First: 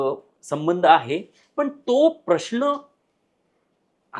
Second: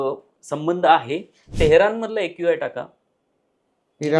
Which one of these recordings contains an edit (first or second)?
second